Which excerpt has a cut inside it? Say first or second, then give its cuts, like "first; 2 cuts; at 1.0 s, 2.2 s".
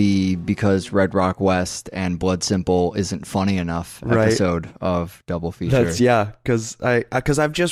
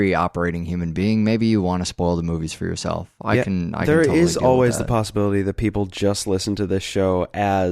second; 1 cut; at 4.8 s